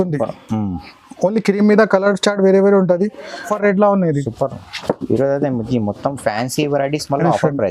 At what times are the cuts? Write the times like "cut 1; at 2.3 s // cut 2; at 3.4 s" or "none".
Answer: cut 1; at 3.5 s